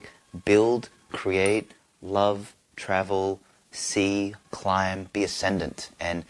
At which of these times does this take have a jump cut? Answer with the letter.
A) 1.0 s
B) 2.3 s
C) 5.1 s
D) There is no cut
C